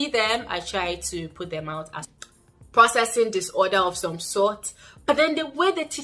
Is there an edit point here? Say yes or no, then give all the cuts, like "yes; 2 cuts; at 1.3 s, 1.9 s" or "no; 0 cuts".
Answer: yes; 1 cut; at 2.1 s